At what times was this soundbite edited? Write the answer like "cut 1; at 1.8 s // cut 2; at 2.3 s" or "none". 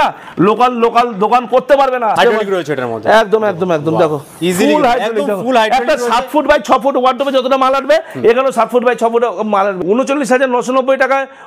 cut 1; at 2.2 s // cut 2; at 9.8 s